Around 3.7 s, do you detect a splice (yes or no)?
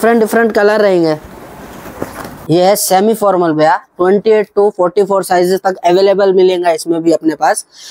no